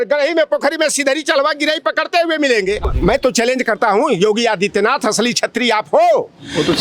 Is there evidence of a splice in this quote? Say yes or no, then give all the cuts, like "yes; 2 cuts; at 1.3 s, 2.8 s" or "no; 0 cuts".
yes; 1 cut; at 2.9 s